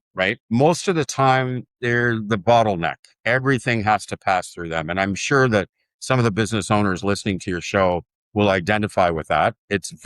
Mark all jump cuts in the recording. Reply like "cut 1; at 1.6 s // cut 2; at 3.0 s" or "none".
none